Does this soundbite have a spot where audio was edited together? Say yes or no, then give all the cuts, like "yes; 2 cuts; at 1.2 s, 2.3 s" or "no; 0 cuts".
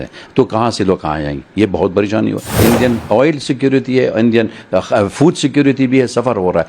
yes; 1 cut; at 2.6 s